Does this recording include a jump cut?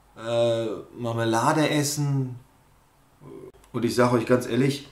yes; 1 cut; at 3.6 s

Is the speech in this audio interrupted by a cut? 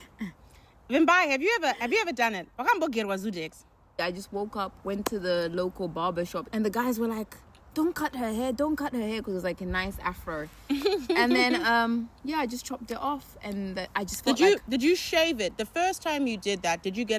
yes; 2 cuts; at 4.0 s, 6.4 s

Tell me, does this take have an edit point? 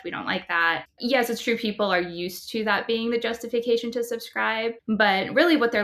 yes; 1 cut; at 0.9 s

